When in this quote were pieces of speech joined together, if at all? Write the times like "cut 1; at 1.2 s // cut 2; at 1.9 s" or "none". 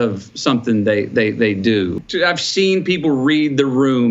cut 1; at 2.0 s